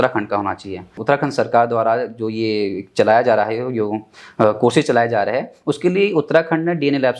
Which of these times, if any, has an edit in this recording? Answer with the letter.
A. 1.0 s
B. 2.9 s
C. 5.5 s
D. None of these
A